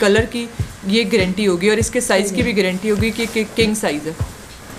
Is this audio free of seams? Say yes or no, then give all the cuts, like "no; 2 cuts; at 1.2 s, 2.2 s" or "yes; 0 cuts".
yes; 0 cuts